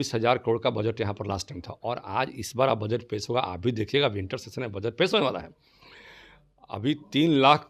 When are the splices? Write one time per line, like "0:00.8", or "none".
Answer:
none

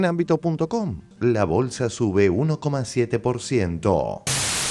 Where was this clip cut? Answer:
0:01.1

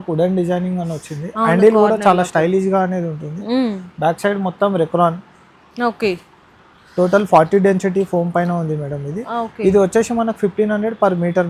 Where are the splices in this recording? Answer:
none

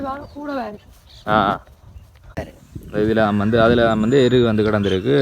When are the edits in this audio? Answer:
0:02.5

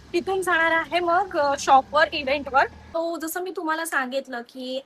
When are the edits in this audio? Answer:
0:03.0

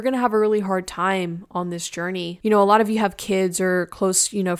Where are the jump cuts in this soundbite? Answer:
0:02.3

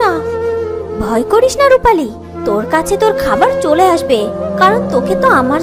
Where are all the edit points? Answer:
none

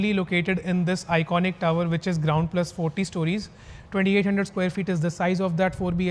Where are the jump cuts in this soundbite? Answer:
none

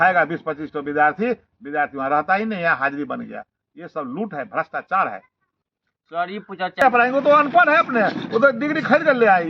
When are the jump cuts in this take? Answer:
0:06.8

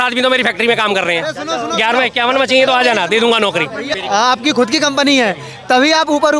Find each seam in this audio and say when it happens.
0:03.9

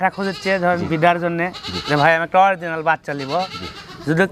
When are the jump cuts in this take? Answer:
none

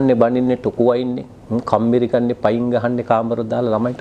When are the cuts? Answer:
none

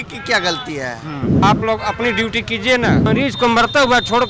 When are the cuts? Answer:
0:01.4
0:03.1

